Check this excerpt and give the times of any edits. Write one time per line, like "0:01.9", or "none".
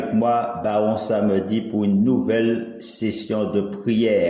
none